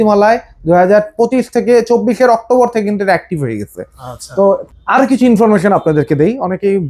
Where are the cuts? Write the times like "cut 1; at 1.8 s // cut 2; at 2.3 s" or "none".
cut 1; at 4.6 s

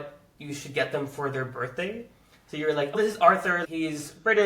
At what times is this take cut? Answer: cut 1; at 2.9 s

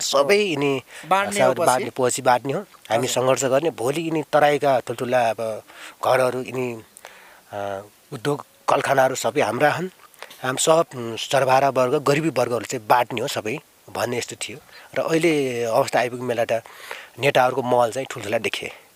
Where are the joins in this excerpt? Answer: none

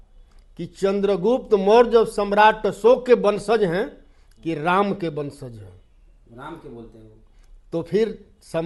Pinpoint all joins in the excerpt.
none

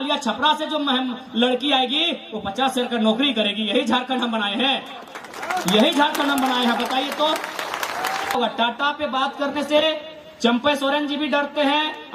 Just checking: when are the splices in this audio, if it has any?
cut 1; at 8.3 s

